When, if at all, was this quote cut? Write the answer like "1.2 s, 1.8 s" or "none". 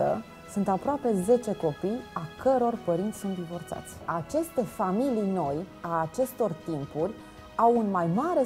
4.1 s